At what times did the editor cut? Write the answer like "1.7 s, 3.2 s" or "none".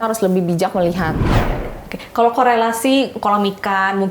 1.3 s